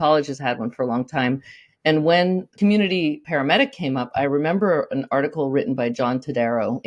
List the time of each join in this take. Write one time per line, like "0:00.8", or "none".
0:02.5
0:03.2